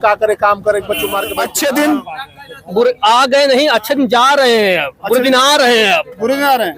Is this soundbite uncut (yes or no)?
no